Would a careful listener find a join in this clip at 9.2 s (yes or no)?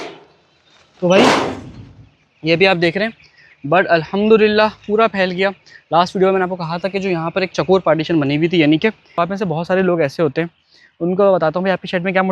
yes